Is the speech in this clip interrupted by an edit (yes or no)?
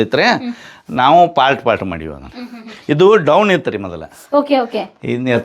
no